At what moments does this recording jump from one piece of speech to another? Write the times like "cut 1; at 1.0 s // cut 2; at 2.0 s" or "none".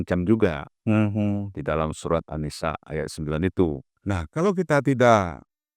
cut 1; at 3.9 s